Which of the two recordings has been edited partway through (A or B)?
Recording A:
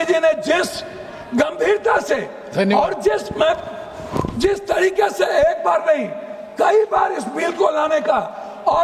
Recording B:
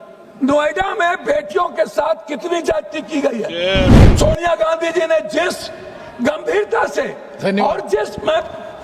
B